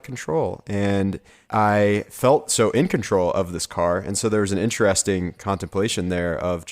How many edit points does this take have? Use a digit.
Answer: 2